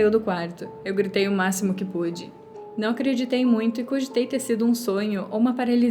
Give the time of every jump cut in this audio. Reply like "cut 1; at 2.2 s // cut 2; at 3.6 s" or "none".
cut 1; at 2.5 s